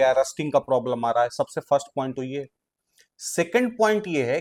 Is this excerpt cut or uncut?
uncut